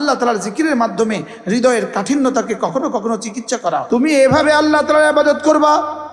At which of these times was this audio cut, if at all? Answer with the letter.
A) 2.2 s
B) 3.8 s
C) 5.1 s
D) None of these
B